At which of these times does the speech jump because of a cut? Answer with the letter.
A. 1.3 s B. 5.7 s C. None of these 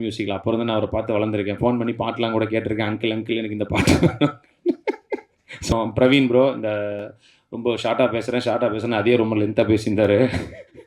B